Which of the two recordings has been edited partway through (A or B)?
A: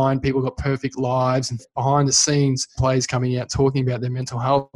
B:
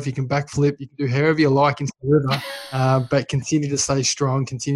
A